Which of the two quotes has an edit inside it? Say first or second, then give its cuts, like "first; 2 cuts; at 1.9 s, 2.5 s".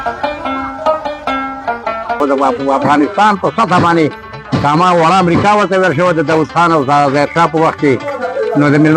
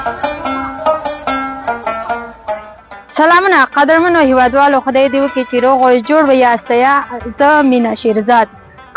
first; 1 cut; at 2.2 s